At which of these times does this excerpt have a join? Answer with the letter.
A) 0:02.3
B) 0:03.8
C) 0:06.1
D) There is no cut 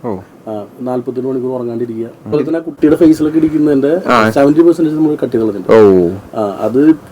A